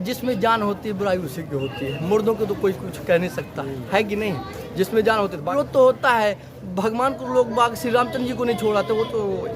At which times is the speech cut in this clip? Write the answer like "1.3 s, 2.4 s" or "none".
5.5 s